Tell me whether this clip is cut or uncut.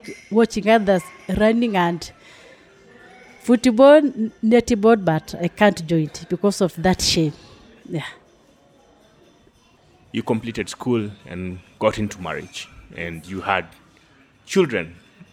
uncut